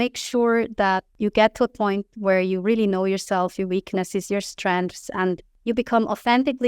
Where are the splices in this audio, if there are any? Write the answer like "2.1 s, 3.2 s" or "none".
1.1 s, 5.5 s